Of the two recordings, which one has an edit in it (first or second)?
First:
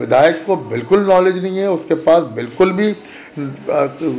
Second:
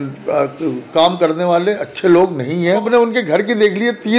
second